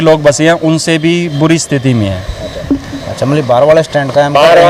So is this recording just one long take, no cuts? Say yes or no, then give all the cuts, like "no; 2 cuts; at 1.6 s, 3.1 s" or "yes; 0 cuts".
yes; 0 cuts